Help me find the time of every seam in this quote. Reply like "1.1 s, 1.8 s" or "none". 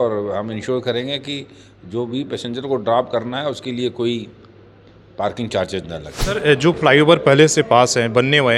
6.2 s

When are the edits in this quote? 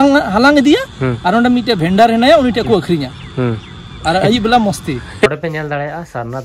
5.3 s

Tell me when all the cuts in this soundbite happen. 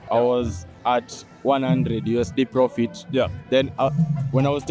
none

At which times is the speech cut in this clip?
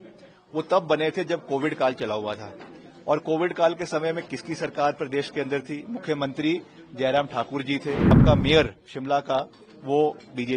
8.2 s

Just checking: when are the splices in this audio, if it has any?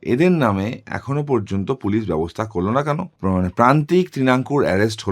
3.1 s

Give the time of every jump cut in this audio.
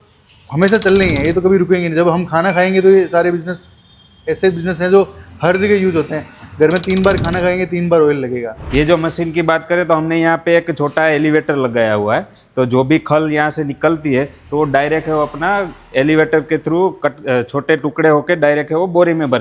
8.5 s

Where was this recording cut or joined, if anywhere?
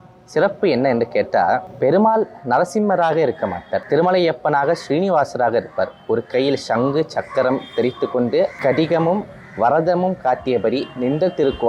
1.7 s, 3.8 s, 8.6 s

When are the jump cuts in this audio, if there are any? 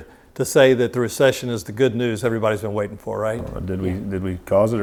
none

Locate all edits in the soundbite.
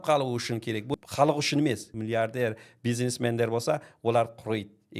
0.9 s, 1.9 s

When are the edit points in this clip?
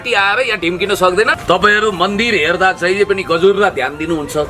1.3 s

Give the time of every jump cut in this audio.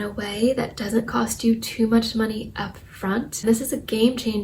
3.3 s

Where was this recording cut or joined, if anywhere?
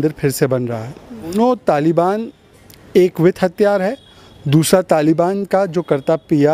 1.3 s

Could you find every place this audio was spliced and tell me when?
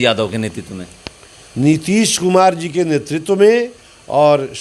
none

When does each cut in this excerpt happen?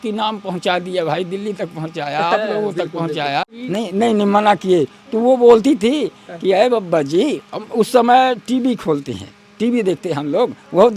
3.5 s

